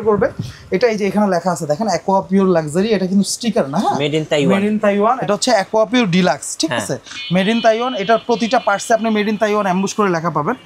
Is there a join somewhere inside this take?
yes; 1 cut; at 5.2 s

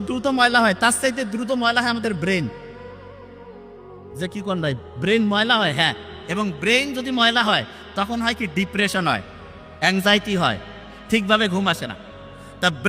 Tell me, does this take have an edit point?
no; 0 cuts

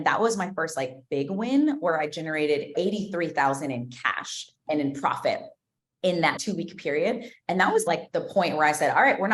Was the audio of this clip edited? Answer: yes; 4 cuts; at 2.7 s, 4.6 s, 6.3 s, 7.9 s

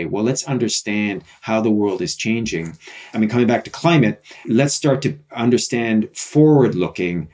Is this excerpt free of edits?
no; 2 cuts; at 3.0 s, 4.5 s

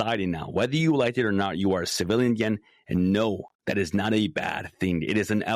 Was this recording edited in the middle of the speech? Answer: no; 0 cuts

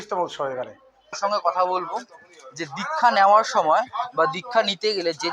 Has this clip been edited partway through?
yes; 1 cut; at 1.1 s

